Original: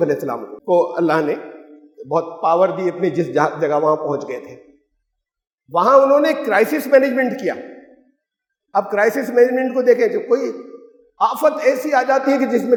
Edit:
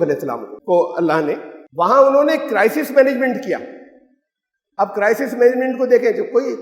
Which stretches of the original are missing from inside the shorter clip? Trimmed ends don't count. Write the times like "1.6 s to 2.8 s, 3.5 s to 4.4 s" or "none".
1.6 s to 5.5 s

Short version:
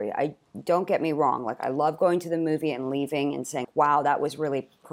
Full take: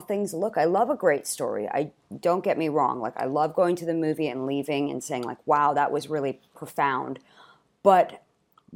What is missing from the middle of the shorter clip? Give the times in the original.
5.2 s to 5.4 s

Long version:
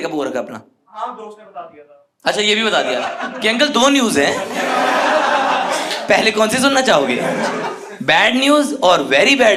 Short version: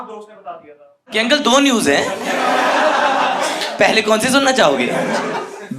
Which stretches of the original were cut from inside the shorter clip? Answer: 2.1 s to 3.3 s

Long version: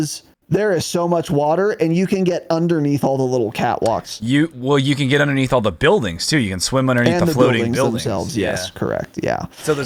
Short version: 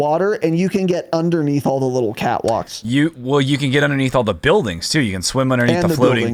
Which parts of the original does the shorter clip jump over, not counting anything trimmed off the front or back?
none

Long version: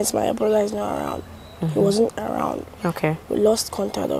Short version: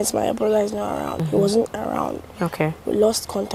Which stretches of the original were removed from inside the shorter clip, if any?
1.1 s to 1.6 s

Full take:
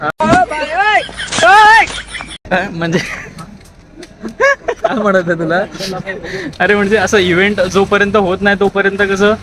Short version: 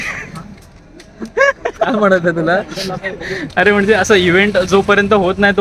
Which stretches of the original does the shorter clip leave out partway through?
none

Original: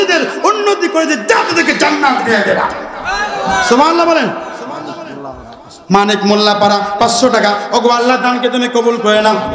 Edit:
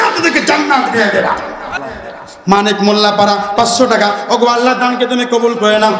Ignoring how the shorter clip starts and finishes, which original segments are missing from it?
3.1 s to 5.2 s

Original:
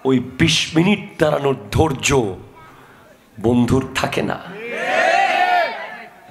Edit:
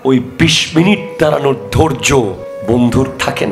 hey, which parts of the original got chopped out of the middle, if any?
2.5 s to 3.2 s

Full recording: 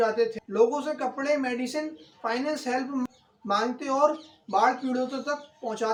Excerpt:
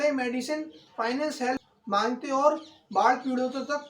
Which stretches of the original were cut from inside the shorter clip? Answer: 2.9 s to 3.2 s

